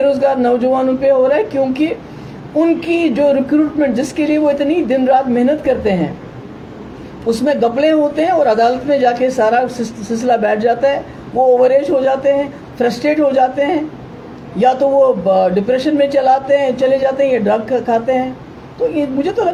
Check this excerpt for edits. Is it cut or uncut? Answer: uncut